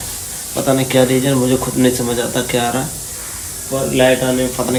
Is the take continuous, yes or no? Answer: yes